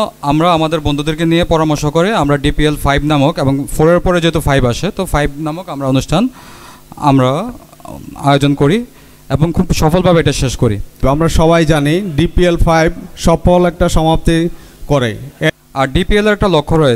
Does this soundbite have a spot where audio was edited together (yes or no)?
yes